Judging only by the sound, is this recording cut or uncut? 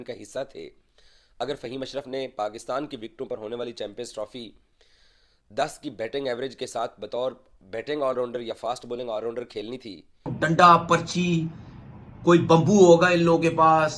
cut